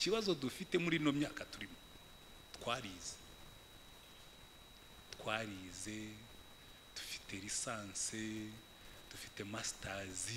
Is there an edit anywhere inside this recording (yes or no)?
no